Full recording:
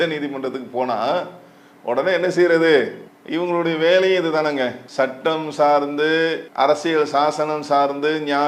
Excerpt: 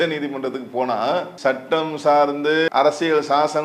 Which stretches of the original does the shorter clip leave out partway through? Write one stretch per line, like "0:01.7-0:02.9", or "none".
0:01.3-0:04.8
0:06.2-0:06.5